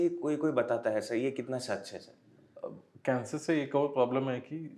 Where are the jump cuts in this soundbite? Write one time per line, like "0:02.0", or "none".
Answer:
none